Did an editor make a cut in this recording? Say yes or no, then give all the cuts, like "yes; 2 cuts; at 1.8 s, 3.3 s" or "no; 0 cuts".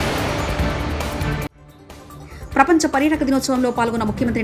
yes; 1 cut; at 1.3 s